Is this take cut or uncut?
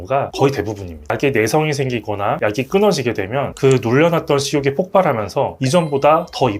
cut